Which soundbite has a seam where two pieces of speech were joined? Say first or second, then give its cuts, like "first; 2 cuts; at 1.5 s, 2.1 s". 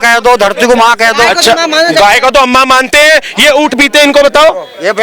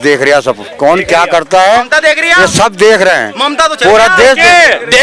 first; 1 cut; at 3.7 s